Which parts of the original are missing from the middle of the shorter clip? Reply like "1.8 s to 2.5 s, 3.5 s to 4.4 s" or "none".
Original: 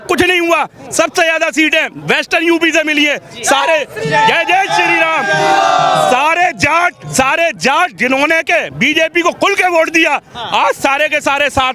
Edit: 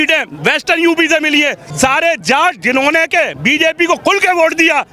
3.3 s to 7.0 s